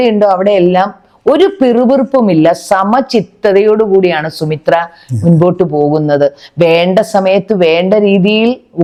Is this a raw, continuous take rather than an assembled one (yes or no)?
yes